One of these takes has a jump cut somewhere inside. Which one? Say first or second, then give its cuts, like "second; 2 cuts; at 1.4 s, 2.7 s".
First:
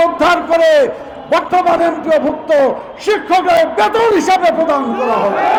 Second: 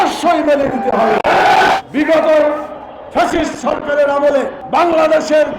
second; 2 cuts; at 1.8 s, 4.6 s